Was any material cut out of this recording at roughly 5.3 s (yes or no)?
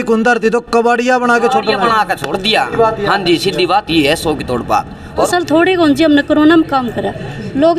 yes